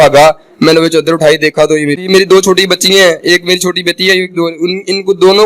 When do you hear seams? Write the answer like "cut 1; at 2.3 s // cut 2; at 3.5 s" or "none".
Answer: cut 1; at 2.0 s